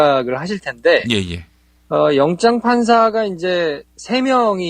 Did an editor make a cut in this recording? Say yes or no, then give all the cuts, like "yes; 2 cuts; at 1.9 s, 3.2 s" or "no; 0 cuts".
yes; 1 cut; at 3.1 s